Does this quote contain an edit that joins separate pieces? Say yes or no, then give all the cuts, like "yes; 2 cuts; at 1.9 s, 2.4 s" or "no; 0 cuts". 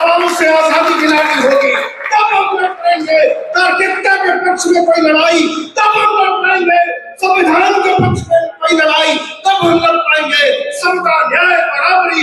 no; 0 cuts